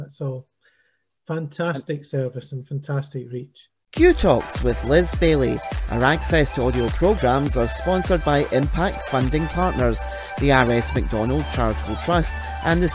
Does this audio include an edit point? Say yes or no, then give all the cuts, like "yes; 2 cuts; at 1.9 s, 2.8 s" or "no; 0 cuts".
yes; 1 cut; at 3.9 s